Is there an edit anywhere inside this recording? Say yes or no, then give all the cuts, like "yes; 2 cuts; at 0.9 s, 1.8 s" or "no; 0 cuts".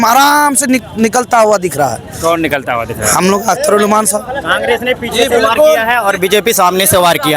no; 0 cuts